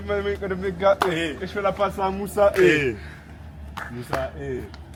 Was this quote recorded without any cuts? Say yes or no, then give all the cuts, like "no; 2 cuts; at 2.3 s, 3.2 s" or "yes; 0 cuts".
yes; 0 cuts